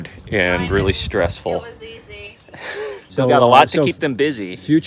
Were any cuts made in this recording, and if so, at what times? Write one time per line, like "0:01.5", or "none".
0:03.0